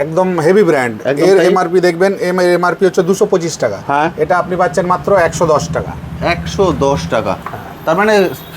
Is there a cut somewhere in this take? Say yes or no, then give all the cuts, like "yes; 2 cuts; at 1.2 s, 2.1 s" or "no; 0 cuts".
no; 0 cuts